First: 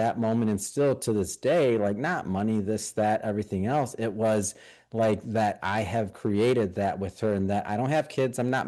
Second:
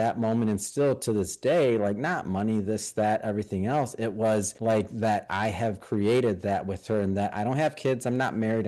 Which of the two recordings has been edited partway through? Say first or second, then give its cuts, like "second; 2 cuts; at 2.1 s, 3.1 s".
second; 1 cut; at 4.5 s